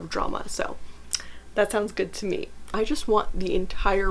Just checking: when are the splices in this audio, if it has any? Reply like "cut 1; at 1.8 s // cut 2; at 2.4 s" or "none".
cut 1; at 2.7 s